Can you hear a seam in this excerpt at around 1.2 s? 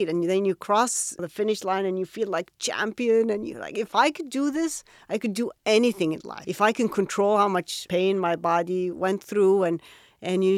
yes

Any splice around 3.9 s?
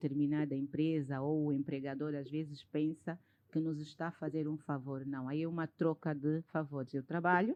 no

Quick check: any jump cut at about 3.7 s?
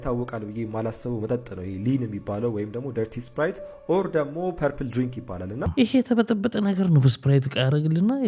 no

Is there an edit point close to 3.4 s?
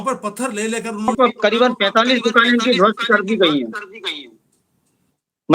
no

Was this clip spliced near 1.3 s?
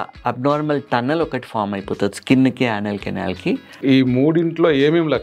no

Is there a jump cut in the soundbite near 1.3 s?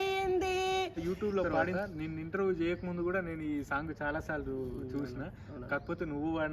yes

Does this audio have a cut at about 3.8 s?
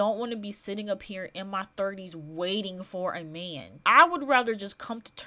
yes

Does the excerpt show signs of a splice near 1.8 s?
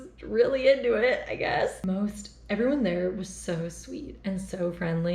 no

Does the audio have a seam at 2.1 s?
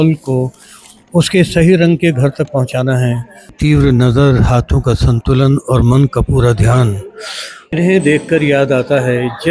no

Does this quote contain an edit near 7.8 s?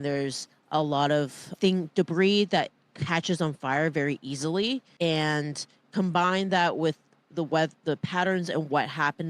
no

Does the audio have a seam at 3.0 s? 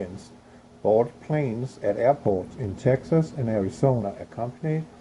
yes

